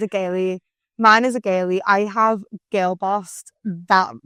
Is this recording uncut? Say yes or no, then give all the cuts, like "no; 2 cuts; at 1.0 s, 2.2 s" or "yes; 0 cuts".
yes; 0 cuts